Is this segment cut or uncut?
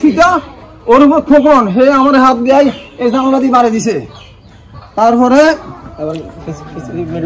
uncut